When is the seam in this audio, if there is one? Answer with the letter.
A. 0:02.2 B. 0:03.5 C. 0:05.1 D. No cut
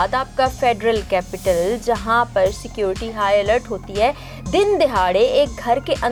D